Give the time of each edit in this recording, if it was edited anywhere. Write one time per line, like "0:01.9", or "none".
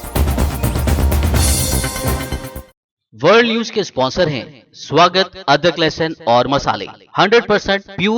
0:02.7

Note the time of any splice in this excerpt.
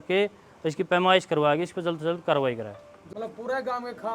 0:03.0

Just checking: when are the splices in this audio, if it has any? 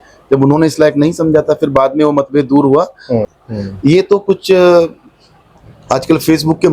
0:03.3

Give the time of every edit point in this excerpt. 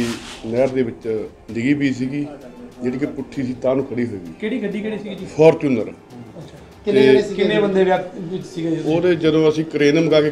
0:01.4

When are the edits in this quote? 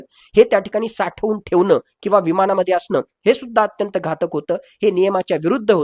none

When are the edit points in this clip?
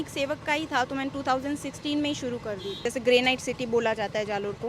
0:02.8

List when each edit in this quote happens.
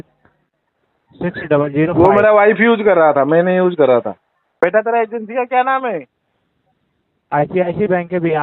0:04.4

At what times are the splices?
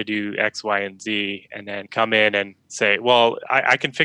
0:01.9
0:02.6

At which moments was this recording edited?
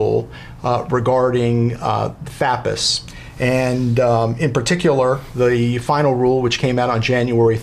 0:03.6

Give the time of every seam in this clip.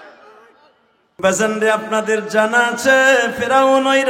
0:01.2

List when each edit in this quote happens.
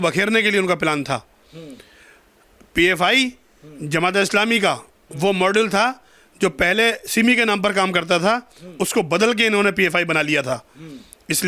none

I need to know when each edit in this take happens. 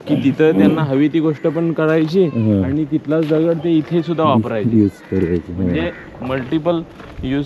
none

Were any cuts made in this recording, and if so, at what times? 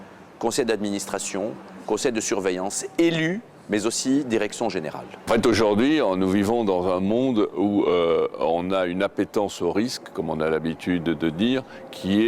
0:05.1

